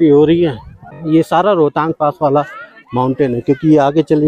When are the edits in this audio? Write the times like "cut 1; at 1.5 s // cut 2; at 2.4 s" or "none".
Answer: cut 1; at 0.9 s